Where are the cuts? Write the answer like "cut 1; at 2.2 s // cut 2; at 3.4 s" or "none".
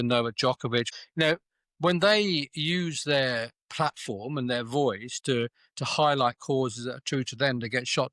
cut 1; at 1.0 s